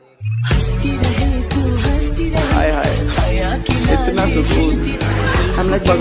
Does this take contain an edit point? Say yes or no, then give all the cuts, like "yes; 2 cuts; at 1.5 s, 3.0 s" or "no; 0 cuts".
no; 0 cuts